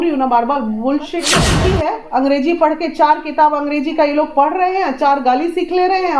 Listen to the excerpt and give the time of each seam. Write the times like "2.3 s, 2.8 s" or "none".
1.5 s